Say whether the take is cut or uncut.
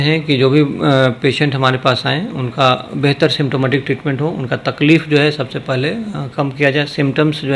uncut